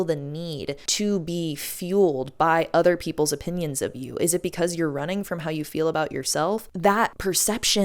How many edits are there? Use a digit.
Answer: 1